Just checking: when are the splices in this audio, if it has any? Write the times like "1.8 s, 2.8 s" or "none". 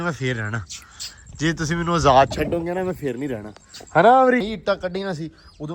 4.4 s